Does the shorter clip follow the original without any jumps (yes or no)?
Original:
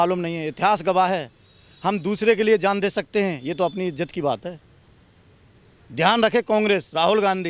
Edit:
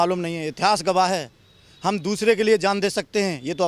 yes